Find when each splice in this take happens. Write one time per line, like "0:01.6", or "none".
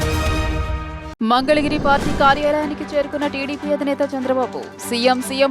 0:01.0